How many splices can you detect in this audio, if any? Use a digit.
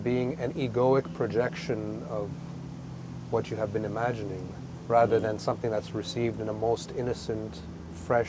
0